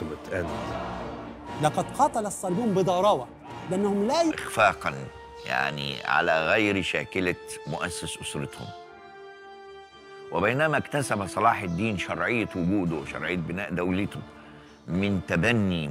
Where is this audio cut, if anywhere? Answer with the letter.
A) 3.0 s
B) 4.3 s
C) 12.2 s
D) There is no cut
D